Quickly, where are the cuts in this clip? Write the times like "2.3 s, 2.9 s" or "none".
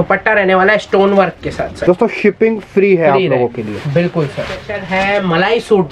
1.7 s, 4.7 s